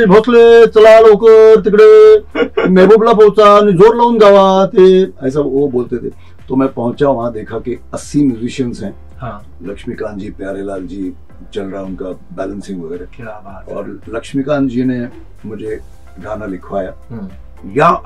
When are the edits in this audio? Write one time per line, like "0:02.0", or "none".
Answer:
none